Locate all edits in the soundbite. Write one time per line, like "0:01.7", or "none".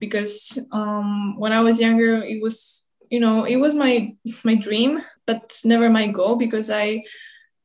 0:05.1